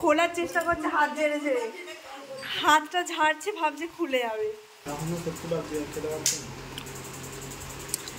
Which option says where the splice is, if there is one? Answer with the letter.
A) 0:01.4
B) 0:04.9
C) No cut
B